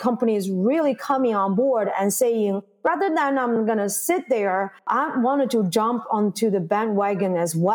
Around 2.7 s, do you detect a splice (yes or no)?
no